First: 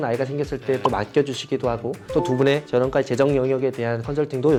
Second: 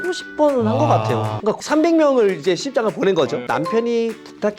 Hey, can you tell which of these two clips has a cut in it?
second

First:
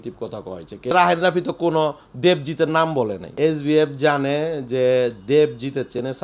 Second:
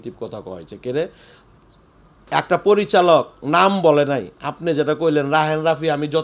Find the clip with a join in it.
first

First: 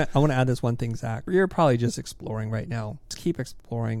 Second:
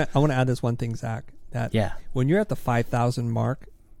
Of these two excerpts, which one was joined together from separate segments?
first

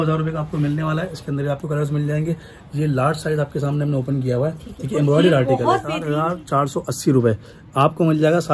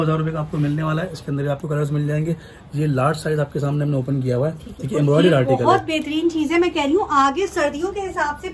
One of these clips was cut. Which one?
first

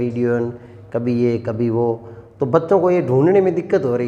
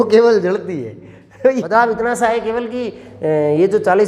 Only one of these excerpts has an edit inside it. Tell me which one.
second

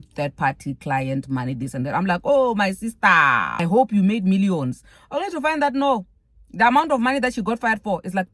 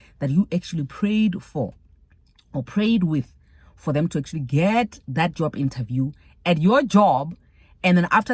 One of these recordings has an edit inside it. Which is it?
first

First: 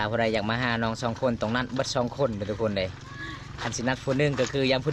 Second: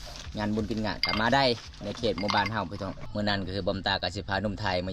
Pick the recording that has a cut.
second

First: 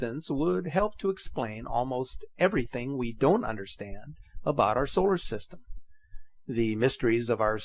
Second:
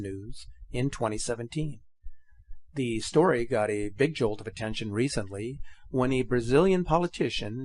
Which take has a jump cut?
first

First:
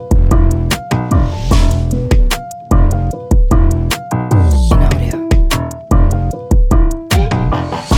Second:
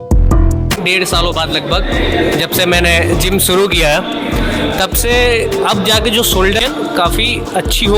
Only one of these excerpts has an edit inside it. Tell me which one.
second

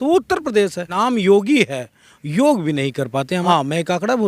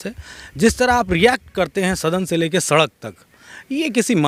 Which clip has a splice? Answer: first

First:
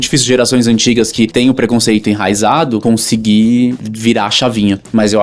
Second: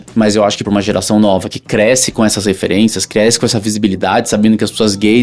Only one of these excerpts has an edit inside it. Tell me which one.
first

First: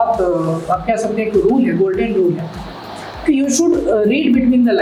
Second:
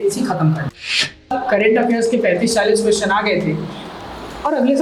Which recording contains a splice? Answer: second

